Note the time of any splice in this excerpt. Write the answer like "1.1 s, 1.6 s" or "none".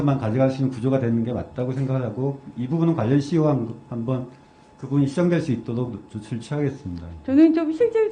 none